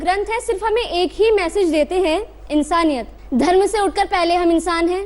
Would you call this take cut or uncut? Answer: cut